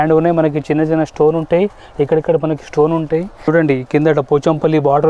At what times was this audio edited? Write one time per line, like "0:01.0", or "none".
0:03.5